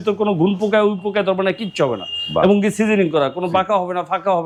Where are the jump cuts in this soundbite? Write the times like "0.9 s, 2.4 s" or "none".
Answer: none